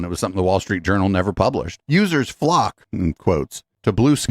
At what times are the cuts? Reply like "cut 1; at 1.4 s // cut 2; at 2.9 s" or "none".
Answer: cut 1; at 1.8 s